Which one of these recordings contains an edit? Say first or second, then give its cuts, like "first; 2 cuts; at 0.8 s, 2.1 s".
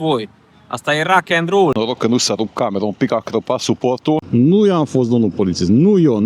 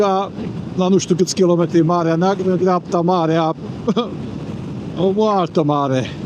first; 2 cuts; at 1.7 s, 4.3 s